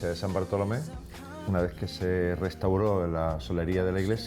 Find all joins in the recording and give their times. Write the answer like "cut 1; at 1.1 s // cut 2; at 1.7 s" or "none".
cut 1; at 1.3 s